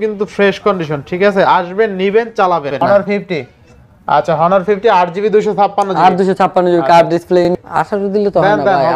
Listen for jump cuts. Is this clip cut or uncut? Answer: cut